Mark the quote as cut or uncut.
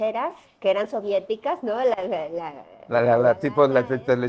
uncut